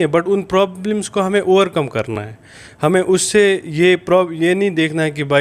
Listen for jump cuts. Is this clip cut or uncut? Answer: uncut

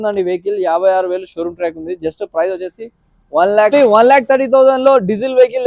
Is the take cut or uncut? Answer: cut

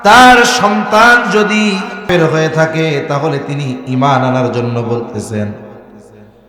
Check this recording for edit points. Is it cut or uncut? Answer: cut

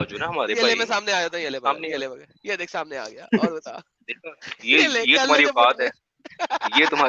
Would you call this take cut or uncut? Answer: uncut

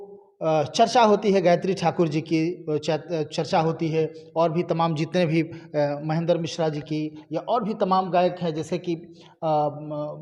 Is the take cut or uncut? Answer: uncut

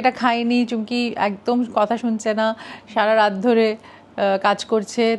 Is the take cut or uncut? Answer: uncut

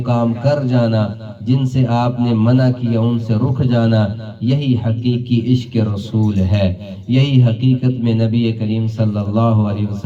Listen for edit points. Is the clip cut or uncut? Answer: uncut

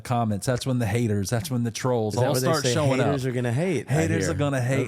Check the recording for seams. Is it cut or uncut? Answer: uncut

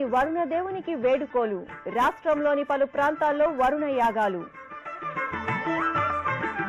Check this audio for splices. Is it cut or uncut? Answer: uncut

